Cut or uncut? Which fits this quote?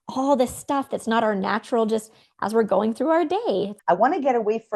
cut